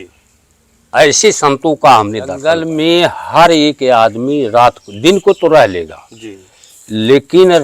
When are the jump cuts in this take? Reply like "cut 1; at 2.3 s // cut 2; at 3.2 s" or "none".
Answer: cut 1; at 2.4 s